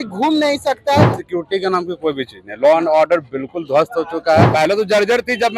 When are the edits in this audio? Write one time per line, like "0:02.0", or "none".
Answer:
0:01.2
0:04.5